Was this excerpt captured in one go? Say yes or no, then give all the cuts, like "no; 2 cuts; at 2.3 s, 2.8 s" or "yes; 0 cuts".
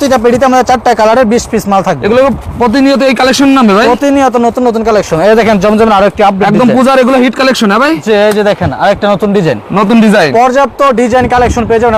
yes; 0 cuts